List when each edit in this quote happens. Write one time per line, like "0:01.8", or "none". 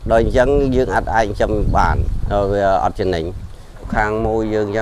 0:03.9